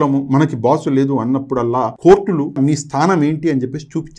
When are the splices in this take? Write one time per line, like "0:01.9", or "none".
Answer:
0:01.9
0:02.6